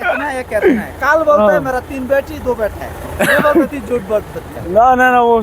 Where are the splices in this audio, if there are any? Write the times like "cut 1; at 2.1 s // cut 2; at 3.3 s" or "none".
none